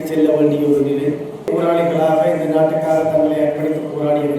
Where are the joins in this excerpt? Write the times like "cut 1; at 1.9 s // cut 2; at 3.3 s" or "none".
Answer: cut 1; at 1.5 s